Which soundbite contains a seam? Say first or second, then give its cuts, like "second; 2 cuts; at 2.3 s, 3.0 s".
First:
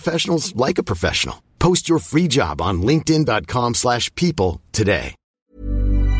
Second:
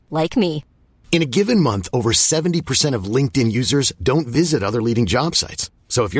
first; 1 cut; at 5.2 s